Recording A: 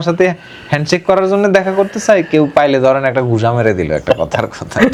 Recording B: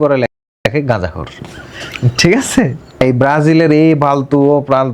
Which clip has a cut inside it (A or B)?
B